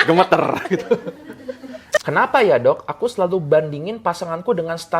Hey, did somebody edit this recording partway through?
yes; 1 cut; at 2.0 s

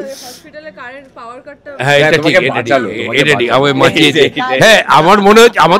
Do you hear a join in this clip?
no; 0 cuts

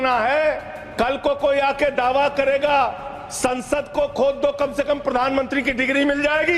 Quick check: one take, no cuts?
yes; 0 cuts

